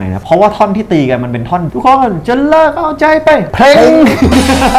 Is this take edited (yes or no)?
yes